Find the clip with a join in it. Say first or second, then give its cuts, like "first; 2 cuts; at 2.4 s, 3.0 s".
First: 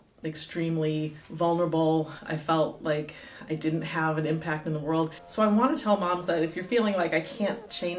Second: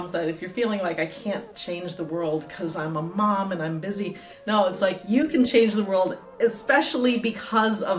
first; 3 cuts; at 1.2 s, 2.2 s, 5.2 s